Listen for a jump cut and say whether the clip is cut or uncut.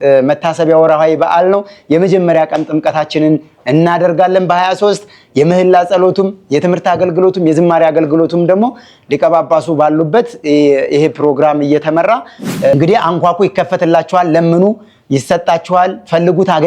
cut